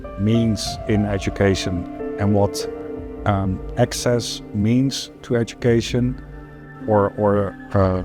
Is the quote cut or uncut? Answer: uncut